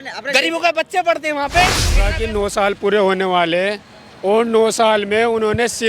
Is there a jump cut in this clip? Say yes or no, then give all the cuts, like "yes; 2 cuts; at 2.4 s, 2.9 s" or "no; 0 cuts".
yes; 1 cut; at 2.1 s